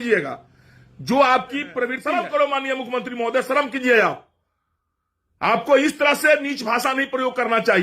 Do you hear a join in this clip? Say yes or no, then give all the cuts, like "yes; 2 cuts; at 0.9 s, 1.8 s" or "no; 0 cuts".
yes; 1 cut; at 2.0 s